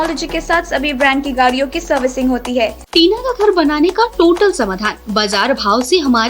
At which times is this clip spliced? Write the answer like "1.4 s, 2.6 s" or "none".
2.8 s